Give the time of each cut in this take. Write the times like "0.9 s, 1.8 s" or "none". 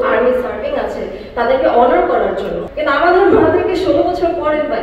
2.6 s

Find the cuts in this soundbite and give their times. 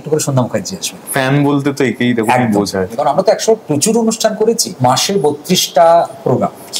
3.0 s, 4.7 s

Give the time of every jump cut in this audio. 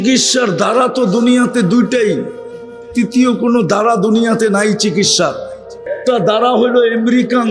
5.9 s

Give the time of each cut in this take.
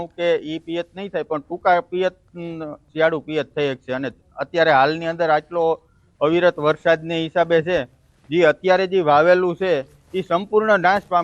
5.1 s

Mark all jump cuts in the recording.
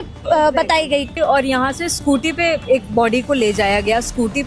1.2 s

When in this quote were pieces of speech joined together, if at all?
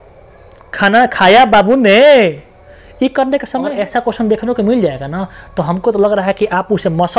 3.7 s

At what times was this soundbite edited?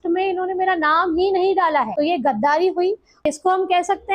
1.9 s, 3.2 s

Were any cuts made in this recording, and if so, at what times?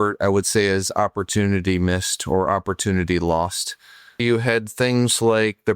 4.2 s

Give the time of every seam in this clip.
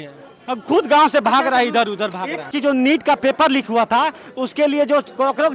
2.5 s

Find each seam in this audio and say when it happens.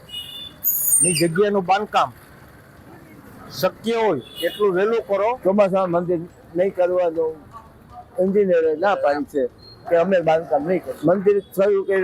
5.4 s, 10.9 s

